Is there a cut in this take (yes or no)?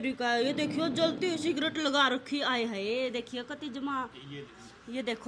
no